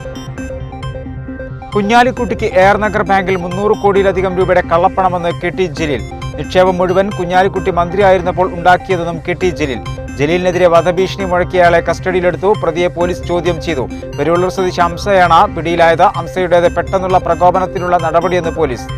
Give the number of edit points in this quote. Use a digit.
0